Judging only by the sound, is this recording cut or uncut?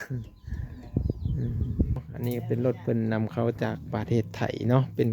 cut